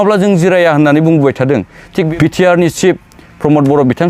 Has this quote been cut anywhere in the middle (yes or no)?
yes